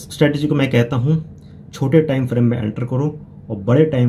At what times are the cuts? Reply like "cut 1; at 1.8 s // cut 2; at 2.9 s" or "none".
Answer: none